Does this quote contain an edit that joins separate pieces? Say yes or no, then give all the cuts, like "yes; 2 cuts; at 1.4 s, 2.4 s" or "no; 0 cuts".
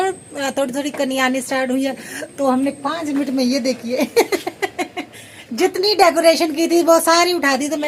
no; 0 cuts